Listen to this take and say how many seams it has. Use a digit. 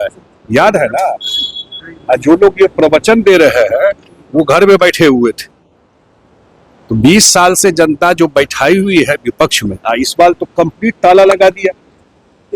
0